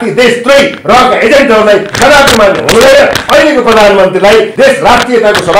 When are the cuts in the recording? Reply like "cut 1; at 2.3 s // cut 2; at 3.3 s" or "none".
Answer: cut 1; at 4.5 s